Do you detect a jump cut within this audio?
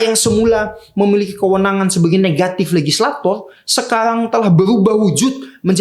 no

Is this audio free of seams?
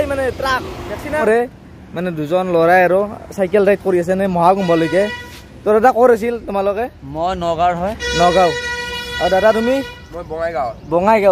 no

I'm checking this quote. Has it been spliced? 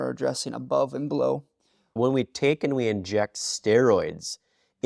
yes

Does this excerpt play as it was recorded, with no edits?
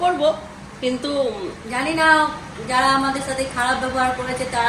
yes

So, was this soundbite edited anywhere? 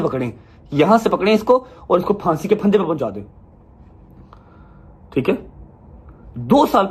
no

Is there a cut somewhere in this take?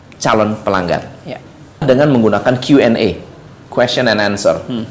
yes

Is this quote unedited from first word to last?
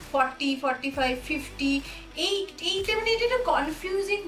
yes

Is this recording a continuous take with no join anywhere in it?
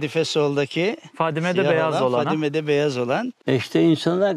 no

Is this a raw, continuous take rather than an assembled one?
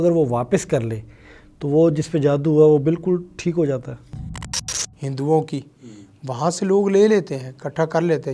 no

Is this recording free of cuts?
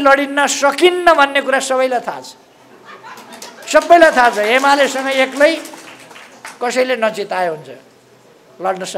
yes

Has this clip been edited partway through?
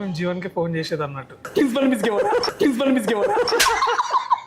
yes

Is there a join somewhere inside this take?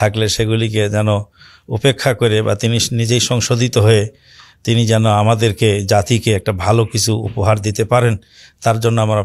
no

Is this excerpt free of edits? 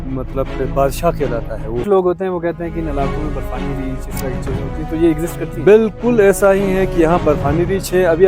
no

